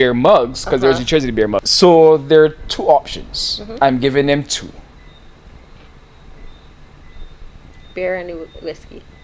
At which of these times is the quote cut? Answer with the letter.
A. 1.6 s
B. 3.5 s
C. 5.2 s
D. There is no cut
A